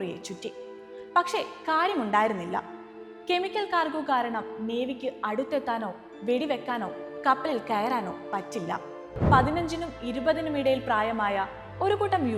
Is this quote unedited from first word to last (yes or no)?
no